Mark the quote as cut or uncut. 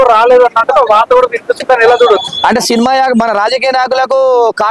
uncut